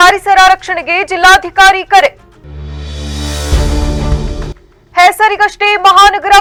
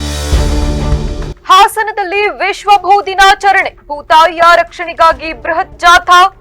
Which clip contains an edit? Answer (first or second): second